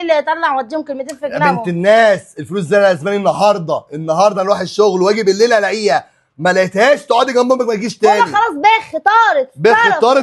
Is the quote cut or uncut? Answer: uncut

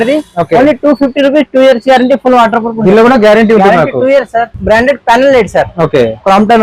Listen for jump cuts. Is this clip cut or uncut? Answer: cut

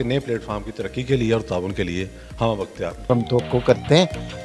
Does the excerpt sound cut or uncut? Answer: cut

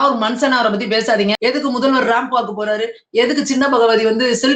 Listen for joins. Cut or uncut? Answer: cut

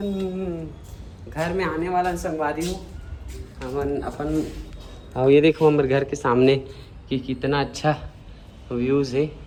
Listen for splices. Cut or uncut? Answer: uncut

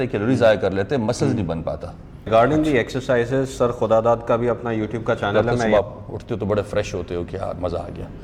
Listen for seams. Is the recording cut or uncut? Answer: cut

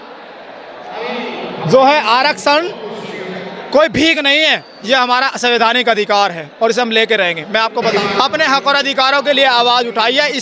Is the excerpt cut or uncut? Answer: cut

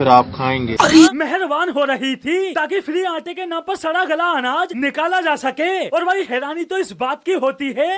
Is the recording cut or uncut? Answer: cut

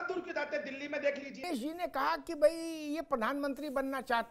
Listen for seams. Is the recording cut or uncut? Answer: cut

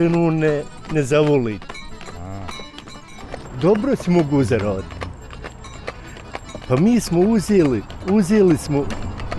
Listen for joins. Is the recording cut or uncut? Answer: cut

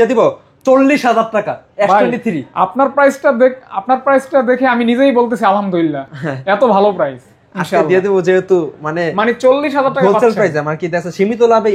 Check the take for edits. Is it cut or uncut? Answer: uncut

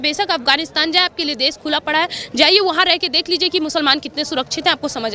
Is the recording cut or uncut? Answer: uncut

